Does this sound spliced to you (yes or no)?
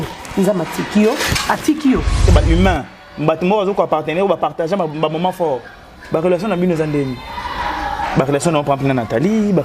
yes